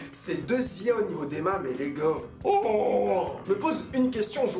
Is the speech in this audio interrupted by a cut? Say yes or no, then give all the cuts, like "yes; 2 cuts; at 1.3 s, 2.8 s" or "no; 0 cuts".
yes; 1 cut; at 3.3 s